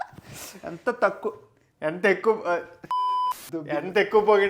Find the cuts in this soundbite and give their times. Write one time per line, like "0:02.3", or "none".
none